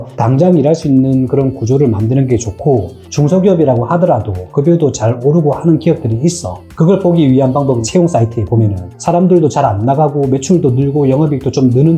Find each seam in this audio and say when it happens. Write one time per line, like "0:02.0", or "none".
0:03.0